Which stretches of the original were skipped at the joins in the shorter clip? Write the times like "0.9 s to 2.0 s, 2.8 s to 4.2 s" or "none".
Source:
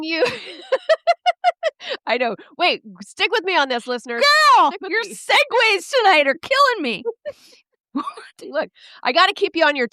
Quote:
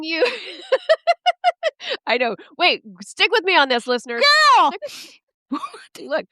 4.8 s to 7.3 s